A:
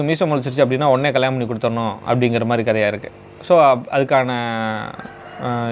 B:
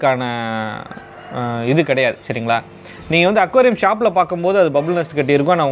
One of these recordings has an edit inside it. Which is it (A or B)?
B